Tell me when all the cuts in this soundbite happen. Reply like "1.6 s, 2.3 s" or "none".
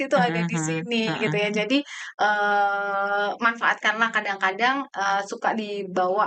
none